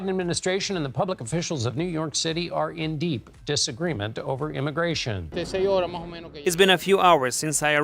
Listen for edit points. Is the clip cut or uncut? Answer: cut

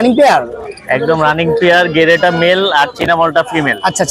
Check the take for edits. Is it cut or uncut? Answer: uncut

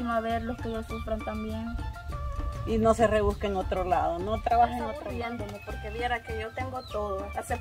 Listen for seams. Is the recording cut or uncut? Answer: cut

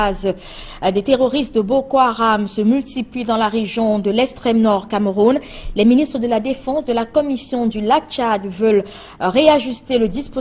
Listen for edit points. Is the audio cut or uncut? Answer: cut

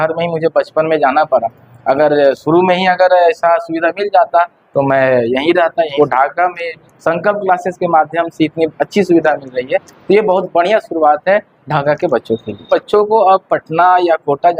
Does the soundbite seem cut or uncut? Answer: cut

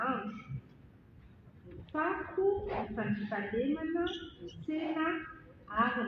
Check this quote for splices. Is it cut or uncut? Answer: uncut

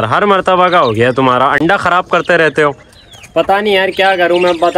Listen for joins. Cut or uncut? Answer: uncut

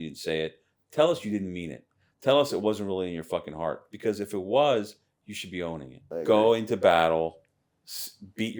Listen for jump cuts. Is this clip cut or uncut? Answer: cut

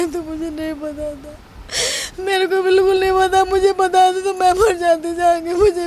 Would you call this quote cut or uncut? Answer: uncut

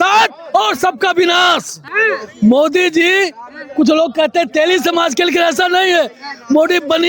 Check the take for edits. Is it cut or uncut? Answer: cut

